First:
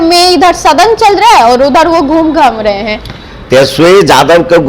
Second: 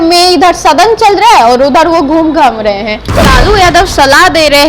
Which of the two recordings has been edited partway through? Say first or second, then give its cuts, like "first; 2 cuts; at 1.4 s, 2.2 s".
second; 1 cut; at 3.1 s